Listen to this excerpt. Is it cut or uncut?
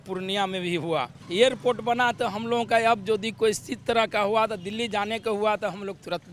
cut